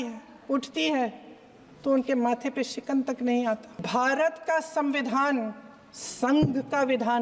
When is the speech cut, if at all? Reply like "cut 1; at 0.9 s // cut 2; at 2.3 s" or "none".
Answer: cut 1; at 3.8 s